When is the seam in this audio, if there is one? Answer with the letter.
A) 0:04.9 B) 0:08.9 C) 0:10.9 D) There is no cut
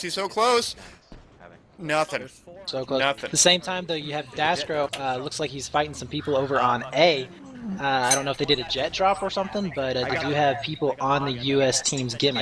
A